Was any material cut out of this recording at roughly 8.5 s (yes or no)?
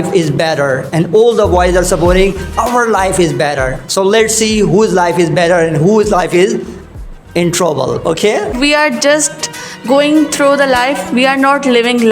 yes